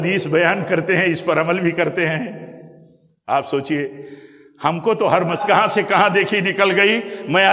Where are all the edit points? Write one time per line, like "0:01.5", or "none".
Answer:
0:05.4